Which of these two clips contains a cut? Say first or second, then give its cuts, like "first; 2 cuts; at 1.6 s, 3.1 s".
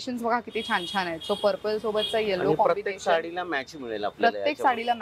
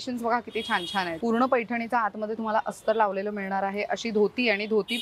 second; 1 cut; at 1.1 s